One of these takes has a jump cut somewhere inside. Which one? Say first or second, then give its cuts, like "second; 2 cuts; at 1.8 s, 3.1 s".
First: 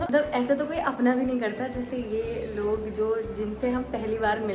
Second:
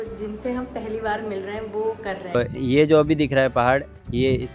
second; 1 cut; at 2.3 s